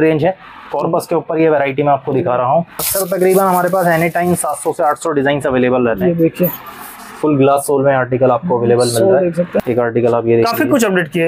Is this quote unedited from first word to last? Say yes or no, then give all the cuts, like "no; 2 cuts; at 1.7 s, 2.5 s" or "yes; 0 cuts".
no; 2 cuts; at 2.8 s, 9.6 s